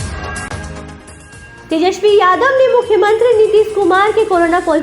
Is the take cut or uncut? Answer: cut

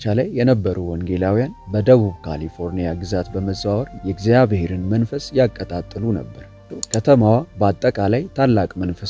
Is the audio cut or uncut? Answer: cut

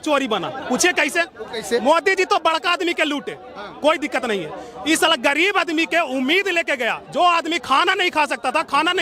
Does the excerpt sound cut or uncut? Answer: uncut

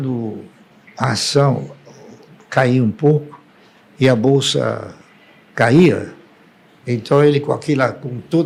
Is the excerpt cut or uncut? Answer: uncut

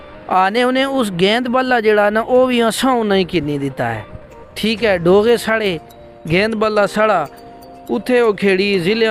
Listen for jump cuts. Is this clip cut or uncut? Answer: uncut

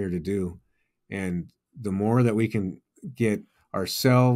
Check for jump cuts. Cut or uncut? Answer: uncut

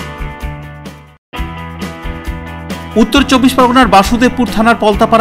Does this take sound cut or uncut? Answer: cut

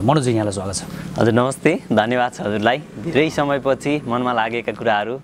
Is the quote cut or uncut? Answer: uncut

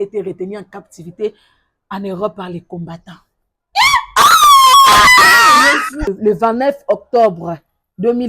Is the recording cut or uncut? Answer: cut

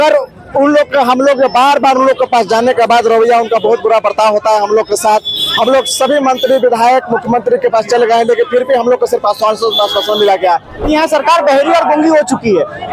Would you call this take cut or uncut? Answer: cut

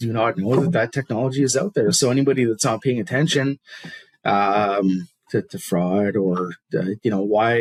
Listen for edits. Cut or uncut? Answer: uncut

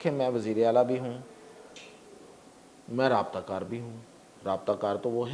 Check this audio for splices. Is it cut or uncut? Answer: uncut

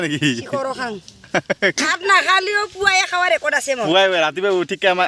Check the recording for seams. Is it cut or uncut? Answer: cut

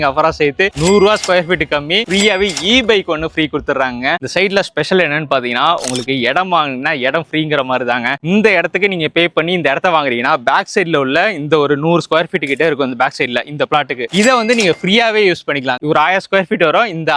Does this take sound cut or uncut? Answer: cut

